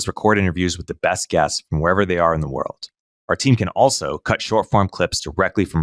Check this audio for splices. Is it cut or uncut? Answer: uncut